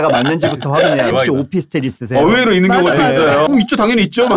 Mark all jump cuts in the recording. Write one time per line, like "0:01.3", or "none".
0:01.1
0:03.5